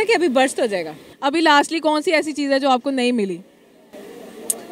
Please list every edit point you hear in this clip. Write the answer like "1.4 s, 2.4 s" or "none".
1.0 s